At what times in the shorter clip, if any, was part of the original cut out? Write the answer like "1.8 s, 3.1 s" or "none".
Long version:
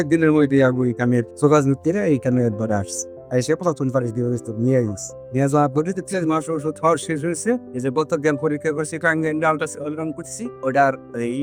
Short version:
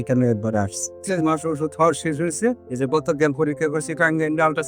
1.0 s

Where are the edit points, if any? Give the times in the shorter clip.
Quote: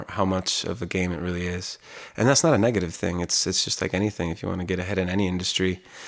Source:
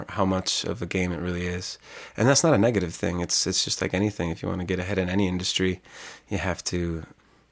none

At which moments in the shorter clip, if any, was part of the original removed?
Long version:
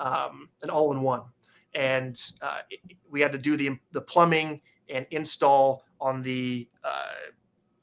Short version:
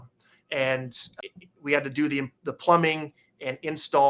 1.2 s

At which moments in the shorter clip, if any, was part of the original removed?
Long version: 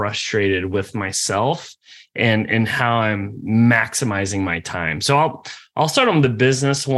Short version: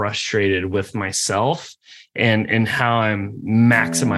none

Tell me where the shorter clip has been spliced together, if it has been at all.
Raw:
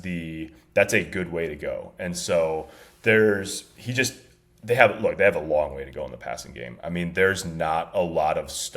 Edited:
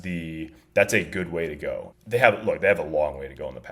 1.9 s

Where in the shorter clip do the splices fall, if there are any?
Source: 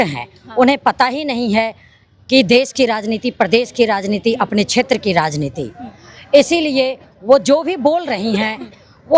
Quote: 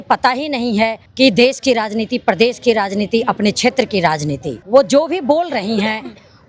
1.0 s, 4.5 s

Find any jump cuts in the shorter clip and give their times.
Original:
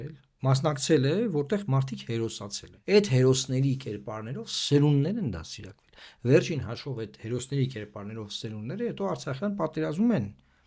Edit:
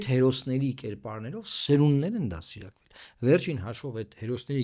none

